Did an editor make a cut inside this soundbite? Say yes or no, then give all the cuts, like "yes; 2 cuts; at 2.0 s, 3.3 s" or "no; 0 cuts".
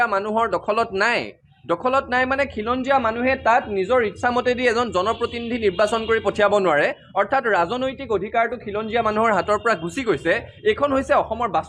no; 0 cuts